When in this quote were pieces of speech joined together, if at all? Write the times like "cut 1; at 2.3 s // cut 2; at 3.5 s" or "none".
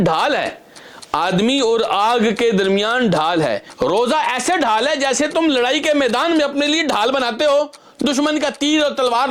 cut 1; at 3.7 s